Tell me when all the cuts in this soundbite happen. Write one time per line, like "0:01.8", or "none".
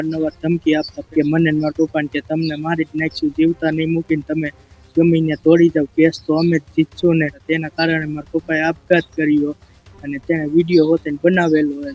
0:01.1
0:07.4